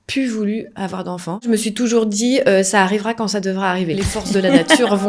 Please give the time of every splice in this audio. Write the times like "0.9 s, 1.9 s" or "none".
1.5 s, 3.9 s